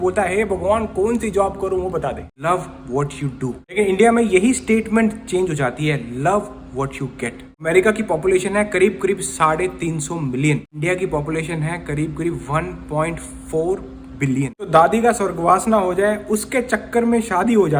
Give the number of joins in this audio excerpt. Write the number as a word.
five